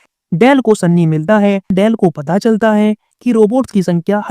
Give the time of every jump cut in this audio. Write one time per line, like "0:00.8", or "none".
0:01.7